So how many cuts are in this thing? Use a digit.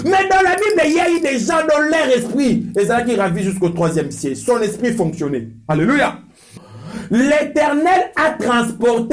1